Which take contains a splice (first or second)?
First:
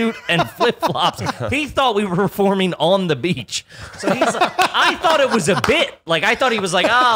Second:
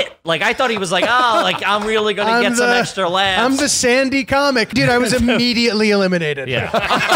second